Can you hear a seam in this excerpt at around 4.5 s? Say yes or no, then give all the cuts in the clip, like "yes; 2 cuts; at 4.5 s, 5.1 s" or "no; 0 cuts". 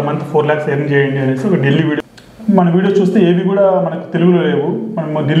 no; 1 cut; at 2.0 s